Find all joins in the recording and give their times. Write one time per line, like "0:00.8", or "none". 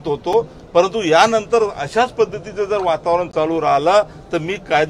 none

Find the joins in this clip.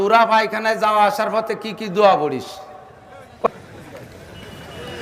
0:03.5

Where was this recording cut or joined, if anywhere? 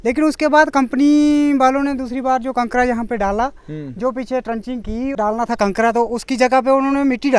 0:05.1

